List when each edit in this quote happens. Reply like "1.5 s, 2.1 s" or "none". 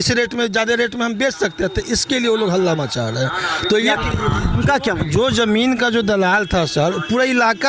3.9 s